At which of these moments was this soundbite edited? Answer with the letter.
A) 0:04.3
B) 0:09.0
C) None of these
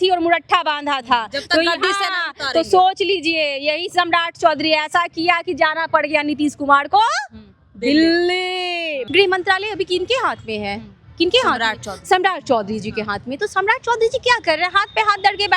B